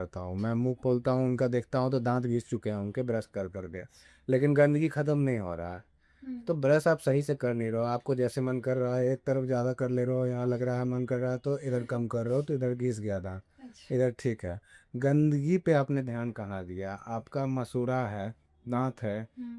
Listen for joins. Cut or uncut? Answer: uncut